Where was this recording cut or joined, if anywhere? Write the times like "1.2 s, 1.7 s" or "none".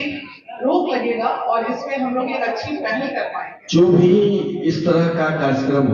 3.5 s